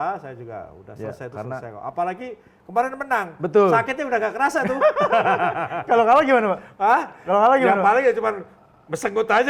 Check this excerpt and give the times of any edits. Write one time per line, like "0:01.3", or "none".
none